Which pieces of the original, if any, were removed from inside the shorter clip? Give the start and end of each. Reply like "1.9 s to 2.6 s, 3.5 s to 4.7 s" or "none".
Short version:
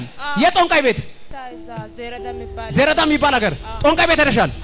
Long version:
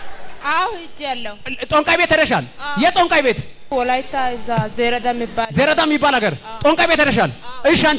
3.5 s to 3.9 s